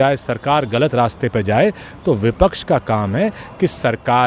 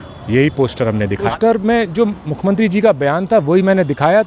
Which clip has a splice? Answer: second; 1 cut; at 1.3 s

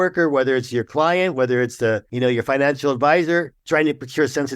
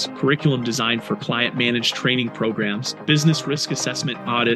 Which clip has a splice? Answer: first; 2 cuts; at 2.1 s, 3.6 s

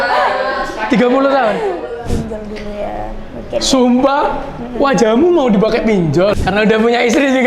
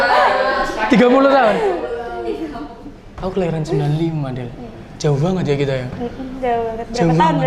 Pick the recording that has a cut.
first; 2 cuts; at 2.1 s, 6.4 s

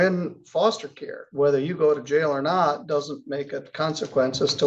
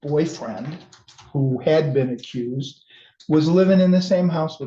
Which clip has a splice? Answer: first; 1 cut; at 1.2 s

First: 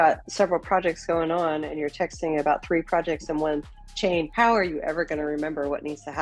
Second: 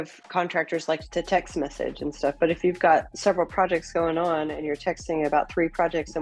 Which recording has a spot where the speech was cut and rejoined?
first; 1 cut; at 4.3 s

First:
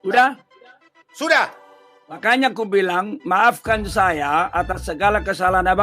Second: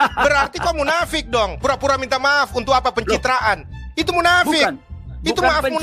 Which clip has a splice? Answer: first; 1 cut; at 2.2 s

